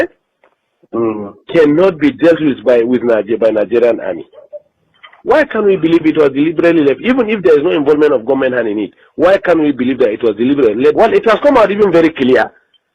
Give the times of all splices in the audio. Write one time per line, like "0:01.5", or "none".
0:11.0

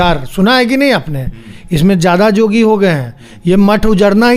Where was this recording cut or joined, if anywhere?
none

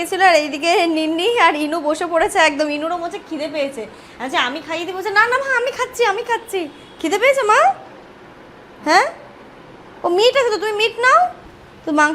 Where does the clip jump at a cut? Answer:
none

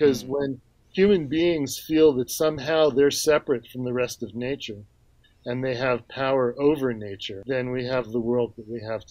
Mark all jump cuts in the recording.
0:07.4

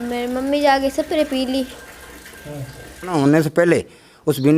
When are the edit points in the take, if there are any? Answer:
0:03.2

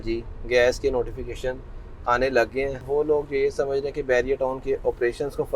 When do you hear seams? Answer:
0:02.8

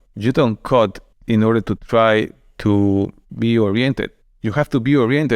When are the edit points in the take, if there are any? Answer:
0:01.1

